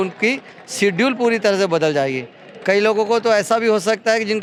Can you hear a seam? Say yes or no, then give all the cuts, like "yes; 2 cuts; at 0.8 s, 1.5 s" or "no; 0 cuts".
no; 0 cuts